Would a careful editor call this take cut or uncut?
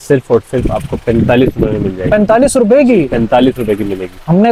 uncut